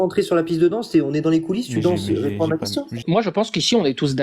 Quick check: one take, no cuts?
no; 1 cut; at 3.0 s

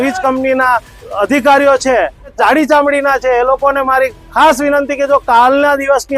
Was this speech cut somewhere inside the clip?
yes; 2 cuts; at 1.0 s, 2.3 s

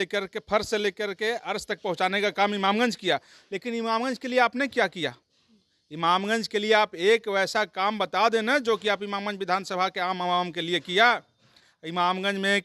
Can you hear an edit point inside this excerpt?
no; 0 cuts

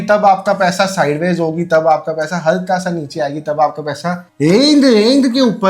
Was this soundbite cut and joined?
no; 0 cuts

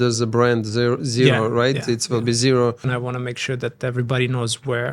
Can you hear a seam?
yes; 1 cut; at 3.0 s

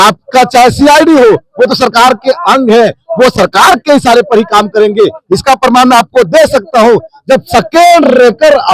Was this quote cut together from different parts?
no; 0 cuts

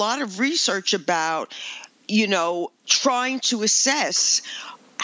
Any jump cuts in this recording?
yes; 1 cut; at 2.8 s

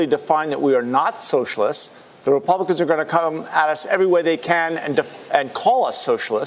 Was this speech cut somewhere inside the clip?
no; 0 cuts

